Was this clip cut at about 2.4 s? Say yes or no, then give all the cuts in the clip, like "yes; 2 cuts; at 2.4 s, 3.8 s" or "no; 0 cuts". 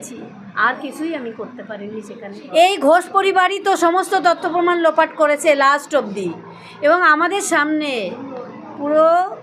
yes; 1 cut; at 2.4 s